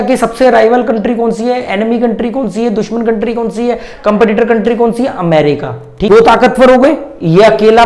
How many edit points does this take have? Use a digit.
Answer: 1